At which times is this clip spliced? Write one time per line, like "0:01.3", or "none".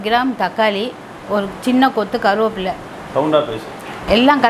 none